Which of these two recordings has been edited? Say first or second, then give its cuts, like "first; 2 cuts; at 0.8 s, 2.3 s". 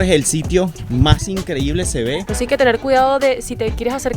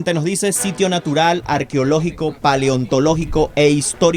first; 1 cut; at 2.3 s